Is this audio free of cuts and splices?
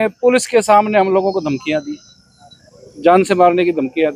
yes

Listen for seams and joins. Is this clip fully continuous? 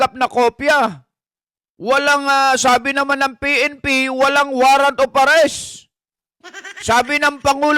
yes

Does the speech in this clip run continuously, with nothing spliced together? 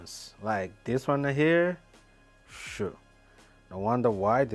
yes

